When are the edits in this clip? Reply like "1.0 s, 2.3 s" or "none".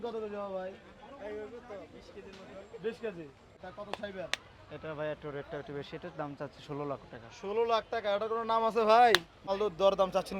3.6 s, 9.5 s